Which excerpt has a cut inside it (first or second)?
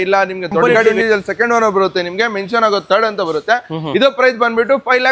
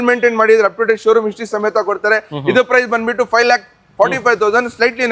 first